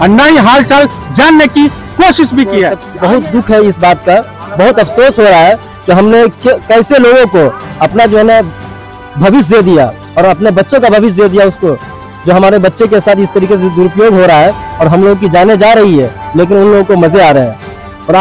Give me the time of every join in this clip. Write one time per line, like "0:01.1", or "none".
0:02.8